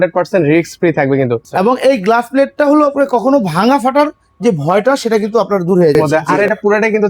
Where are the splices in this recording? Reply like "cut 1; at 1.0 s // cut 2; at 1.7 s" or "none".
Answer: cut 1; at 1.4 s // cut 2; at 5.9 s